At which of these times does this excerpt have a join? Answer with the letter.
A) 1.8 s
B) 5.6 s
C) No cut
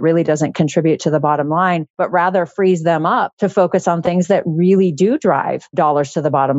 B